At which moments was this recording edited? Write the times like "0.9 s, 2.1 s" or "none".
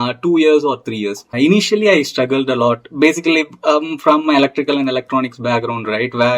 1.3 s